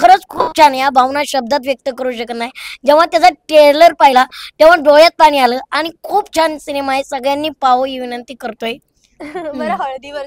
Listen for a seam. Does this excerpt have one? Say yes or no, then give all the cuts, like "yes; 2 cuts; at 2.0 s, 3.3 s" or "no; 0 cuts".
no; 0 cuts